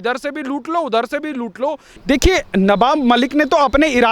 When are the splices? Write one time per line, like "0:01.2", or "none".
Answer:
0:01.9